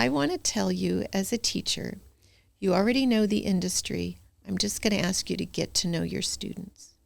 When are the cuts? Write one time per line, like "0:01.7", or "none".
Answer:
none